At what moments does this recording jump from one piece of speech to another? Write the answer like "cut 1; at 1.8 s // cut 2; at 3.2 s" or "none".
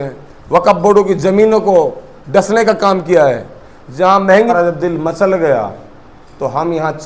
cut 1; at 4.5 s